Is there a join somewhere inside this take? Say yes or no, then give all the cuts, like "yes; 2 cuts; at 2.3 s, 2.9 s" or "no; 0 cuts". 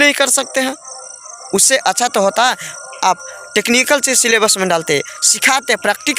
no; 0 cuts